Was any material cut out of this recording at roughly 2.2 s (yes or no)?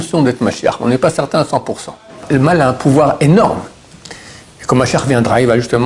yes